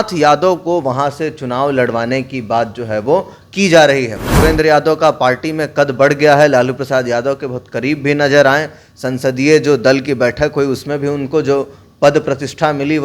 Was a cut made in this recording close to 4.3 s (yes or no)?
yes